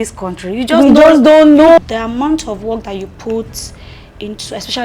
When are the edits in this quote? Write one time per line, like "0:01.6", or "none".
0:01.8